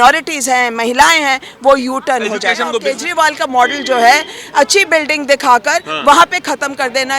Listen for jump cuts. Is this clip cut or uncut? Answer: cut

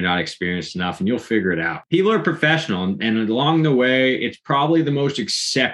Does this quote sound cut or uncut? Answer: cut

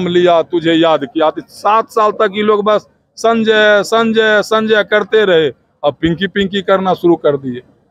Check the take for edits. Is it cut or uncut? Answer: uncut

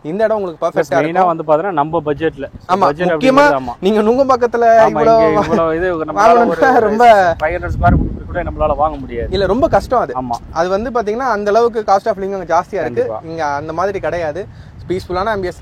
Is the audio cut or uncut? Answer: uncut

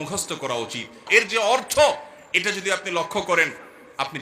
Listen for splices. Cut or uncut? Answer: cut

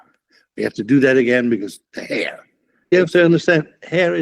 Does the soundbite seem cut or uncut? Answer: cut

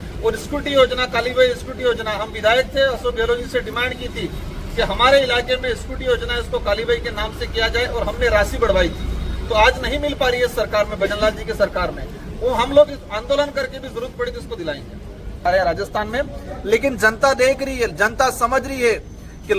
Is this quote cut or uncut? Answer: cut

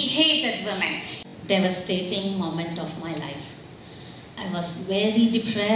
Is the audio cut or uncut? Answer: cut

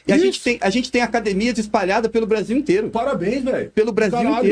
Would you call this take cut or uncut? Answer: uncut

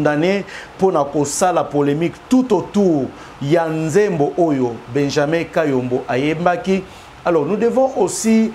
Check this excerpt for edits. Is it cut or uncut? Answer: uncut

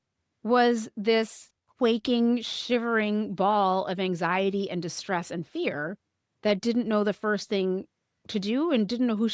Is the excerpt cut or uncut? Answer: uncut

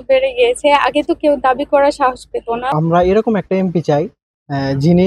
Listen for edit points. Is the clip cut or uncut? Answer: cut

